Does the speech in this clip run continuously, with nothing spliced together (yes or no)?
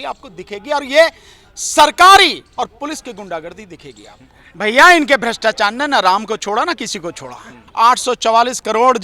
no